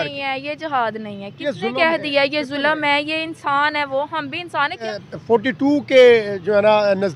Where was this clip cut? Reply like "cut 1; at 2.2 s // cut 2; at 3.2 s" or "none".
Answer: cut 1; at 4.9 s